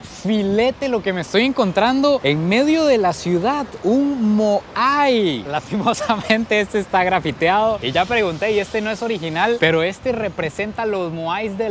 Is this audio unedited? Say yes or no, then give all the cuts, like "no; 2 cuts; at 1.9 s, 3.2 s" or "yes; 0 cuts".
yes; 0 cuts